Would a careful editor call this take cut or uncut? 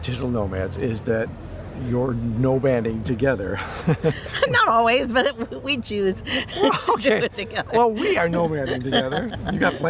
uncut